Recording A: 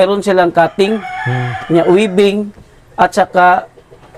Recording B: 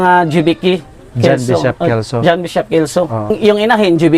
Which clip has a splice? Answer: B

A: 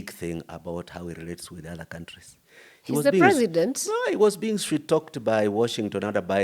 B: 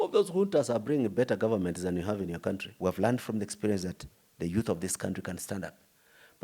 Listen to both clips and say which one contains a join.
B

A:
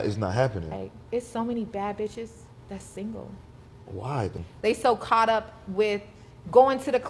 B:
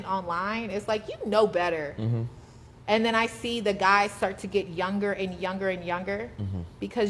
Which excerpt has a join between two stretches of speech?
A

